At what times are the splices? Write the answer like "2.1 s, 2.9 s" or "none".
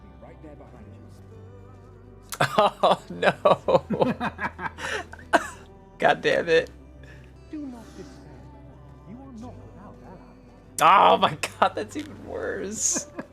7.3 s